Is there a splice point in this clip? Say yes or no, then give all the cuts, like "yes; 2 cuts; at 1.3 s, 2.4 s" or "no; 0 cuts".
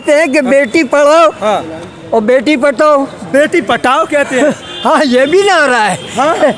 no; 0 cuts